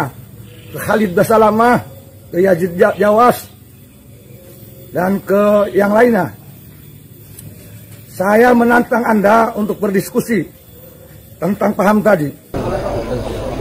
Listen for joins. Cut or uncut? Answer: cut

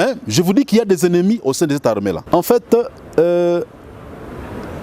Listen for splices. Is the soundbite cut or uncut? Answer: cut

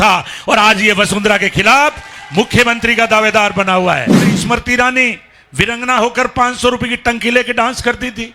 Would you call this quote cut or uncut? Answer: cut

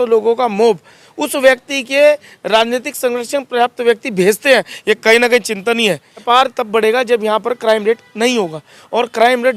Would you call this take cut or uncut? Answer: cut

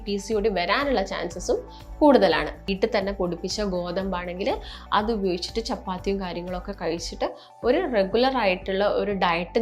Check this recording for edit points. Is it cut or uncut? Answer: cut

